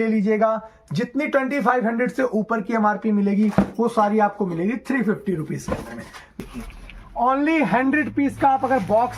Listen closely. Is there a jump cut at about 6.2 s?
yes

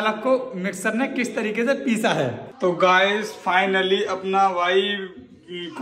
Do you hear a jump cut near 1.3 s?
no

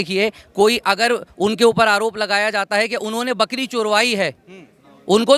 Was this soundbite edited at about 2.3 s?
no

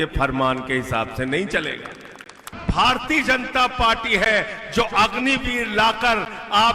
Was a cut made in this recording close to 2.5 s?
yes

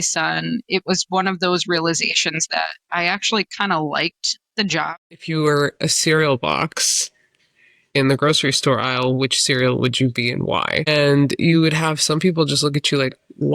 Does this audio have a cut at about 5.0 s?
yes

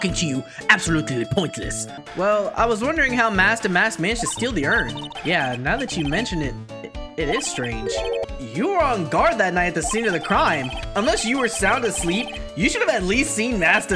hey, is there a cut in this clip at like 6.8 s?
no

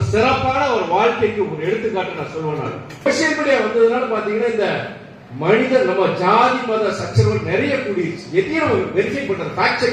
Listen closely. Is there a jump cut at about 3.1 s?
yes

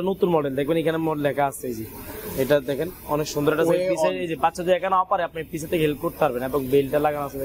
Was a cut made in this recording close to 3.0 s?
no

